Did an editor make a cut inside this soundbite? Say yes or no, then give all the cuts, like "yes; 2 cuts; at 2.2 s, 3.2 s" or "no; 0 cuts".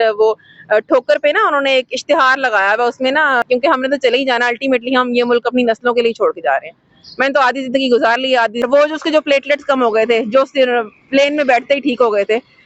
yes; 2 cuts; at 3.5 s, 8.6 s